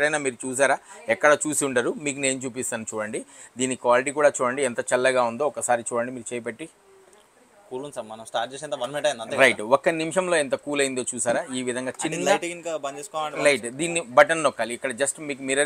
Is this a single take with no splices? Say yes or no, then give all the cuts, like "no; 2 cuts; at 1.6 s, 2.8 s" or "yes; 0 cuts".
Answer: yes; 0 cuts